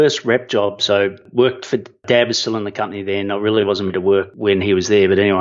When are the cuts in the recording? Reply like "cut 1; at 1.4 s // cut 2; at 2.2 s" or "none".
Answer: cut 1; at 1.2 s